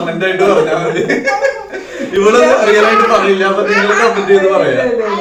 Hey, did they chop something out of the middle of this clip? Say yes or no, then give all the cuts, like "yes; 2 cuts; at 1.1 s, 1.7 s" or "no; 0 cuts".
no; 0 cuts